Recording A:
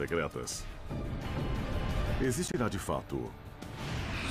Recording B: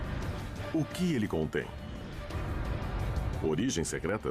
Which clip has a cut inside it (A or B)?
B